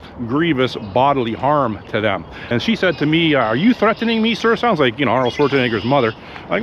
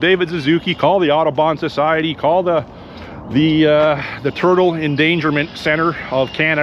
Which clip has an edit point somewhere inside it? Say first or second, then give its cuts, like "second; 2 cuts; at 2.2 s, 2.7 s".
first; 1 cut; at 2.3 s